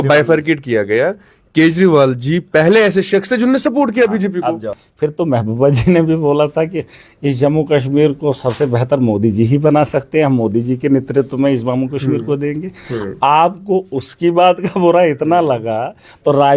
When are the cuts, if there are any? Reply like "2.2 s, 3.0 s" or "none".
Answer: none